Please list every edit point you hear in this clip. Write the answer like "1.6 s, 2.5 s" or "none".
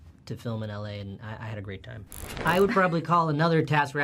2.3 s